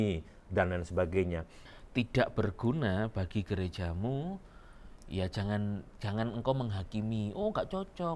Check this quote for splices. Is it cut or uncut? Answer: cut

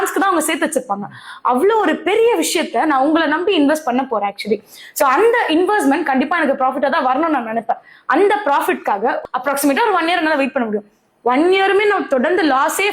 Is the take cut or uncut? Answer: cut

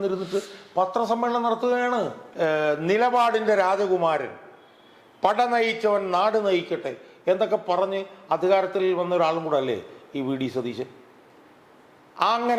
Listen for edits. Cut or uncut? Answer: cut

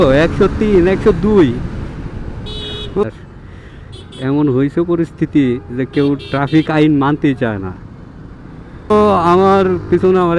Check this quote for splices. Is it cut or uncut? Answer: cut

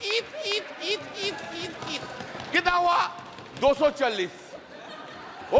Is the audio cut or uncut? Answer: uncut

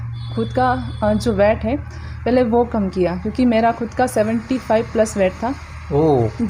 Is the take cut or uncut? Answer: uncut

